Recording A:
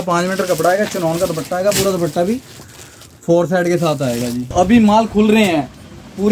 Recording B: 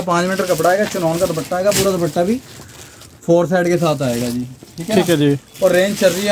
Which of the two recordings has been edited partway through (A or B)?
A